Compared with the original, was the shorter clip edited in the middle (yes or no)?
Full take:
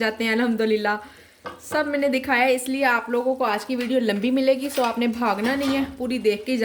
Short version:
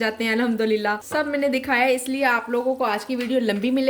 yes